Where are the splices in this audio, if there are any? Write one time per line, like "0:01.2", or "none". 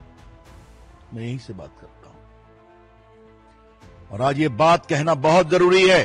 0:01.1